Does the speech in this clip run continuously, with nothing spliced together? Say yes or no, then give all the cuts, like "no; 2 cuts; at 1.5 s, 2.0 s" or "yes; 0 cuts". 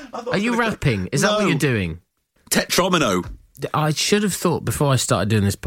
no; 1 cut; at 3.6 s